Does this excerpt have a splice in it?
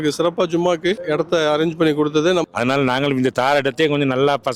yes; 1 cut; at 2.4 s

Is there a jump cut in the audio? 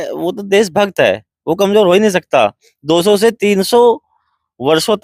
no; 0 cuts

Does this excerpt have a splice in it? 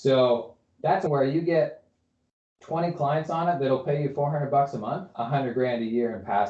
yes; 2 cuts; at 1.1 s, 5.0 s

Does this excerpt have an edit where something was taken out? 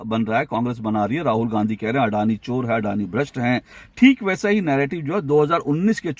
yes; 1 cut; at 3.8 s

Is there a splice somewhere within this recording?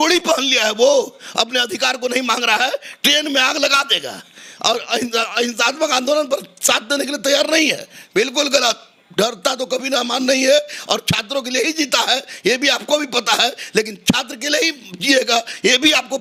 no; 0 cuts

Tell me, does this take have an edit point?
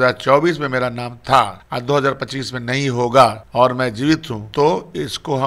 yes; 3 cuts; at 1.6 s, 3.4 s, 4.4 s

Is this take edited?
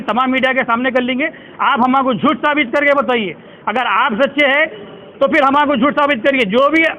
no; 0 cuts

